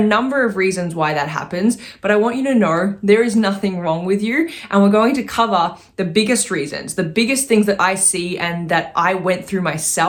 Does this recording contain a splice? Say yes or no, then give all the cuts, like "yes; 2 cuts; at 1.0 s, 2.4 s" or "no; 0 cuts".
no; 0 cuts